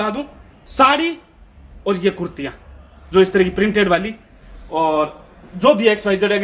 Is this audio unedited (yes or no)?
yes